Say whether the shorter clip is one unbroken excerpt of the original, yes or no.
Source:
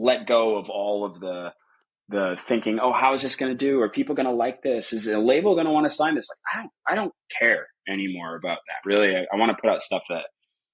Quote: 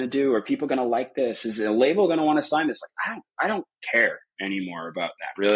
yes